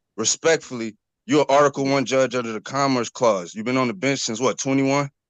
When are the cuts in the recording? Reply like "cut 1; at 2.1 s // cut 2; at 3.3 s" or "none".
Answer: none